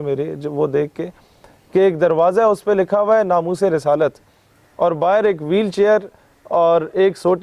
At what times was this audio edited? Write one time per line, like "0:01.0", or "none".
none